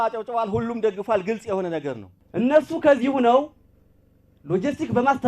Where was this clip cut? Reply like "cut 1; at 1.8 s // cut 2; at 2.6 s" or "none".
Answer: cut 1; at 2.1 s